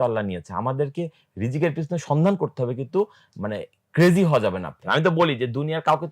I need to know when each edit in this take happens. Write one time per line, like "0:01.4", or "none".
0:04.8

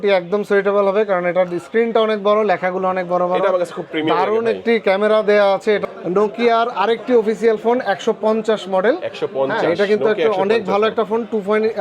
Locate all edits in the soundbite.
0:05.8

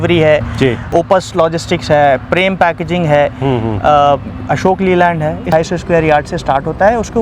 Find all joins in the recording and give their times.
0:00.9
0:05.5

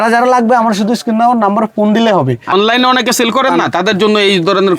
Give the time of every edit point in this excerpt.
0:02.5

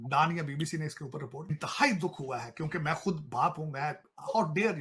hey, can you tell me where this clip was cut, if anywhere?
0:01.6

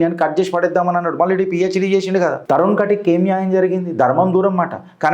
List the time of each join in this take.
0:02.4

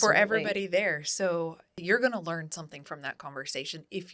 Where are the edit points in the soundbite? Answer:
0:01.7

